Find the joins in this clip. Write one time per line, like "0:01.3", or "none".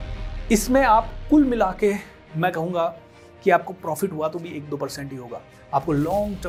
none